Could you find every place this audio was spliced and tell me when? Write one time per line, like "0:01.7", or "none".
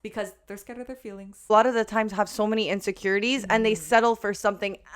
0:01.5